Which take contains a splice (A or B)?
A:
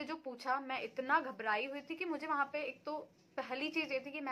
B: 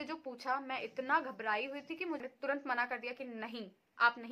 B